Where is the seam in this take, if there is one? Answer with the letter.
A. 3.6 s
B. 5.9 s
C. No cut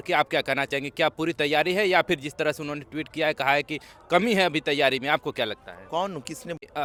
C